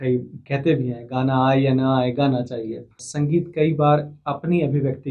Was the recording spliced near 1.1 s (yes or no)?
no